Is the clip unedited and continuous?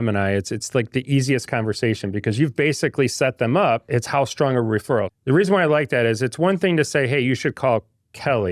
no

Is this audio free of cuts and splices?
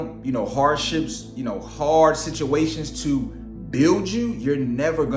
yes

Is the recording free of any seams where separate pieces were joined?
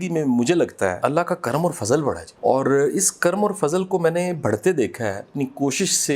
no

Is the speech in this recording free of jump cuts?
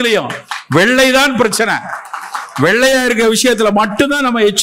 yes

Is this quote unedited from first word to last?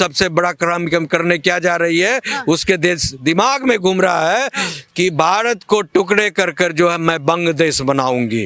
yes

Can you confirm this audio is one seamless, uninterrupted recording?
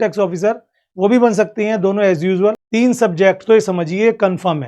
no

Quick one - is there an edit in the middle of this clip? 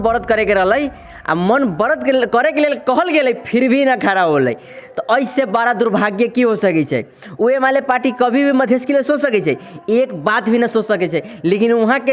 no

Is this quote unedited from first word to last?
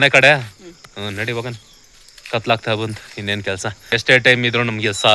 no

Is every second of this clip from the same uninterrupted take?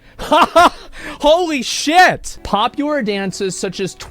no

